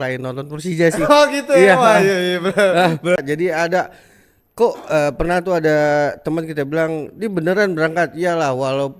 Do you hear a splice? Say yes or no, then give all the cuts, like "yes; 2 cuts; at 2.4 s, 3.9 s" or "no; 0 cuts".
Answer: yes; 1 cut; at 3.2 s